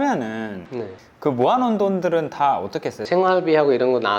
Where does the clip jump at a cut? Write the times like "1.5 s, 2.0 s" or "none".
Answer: 3.0 s